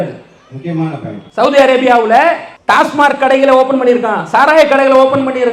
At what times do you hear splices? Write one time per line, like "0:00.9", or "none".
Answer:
0:01.2
0:02.5